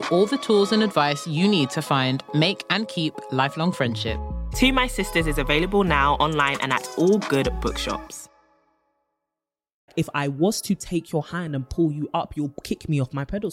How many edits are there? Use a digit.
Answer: 1